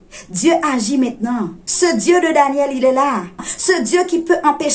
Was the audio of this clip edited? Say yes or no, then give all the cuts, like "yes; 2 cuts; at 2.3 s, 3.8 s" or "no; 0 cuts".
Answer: yes; 2 cuts; at 1.6 s, 3.5 s